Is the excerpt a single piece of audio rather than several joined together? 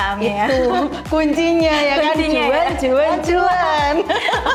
yes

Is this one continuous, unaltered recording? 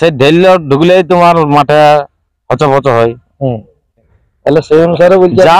no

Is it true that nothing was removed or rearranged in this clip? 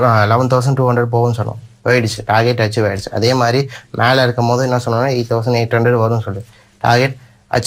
yes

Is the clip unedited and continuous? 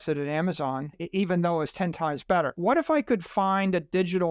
no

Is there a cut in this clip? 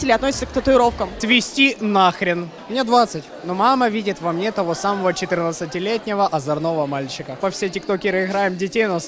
yes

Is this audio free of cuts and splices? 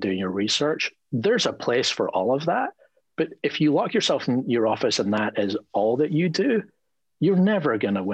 yes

